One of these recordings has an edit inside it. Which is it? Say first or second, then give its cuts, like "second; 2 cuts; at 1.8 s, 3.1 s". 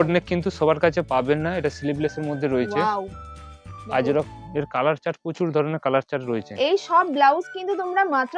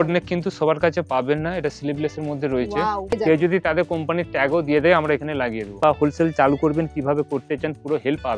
second; 2 cuts; at 3.1 s, 5.8 s